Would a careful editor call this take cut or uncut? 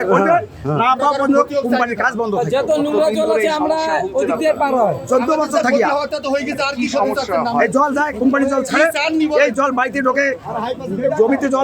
uncut